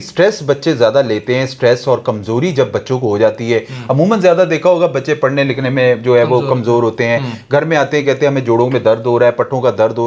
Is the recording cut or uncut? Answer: uncut